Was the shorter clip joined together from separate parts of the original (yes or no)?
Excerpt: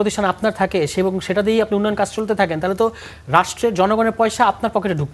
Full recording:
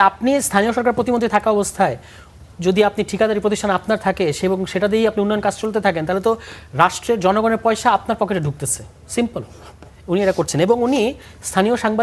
no